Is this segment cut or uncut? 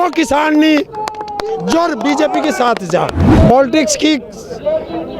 cut